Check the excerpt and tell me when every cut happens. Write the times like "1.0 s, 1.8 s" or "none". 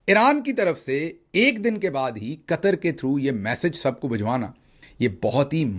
4.8 s